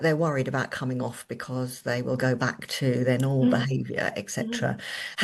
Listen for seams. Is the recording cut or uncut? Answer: uncut